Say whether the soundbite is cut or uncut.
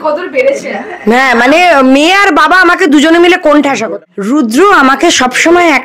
cut